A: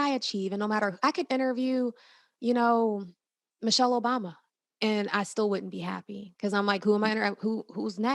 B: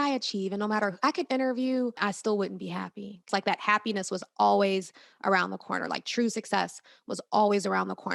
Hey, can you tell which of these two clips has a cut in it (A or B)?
B